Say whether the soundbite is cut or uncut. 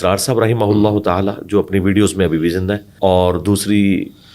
cut